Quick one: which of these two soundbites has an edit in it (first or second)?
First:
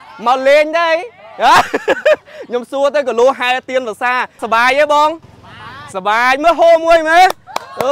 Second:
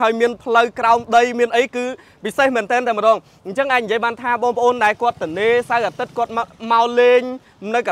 first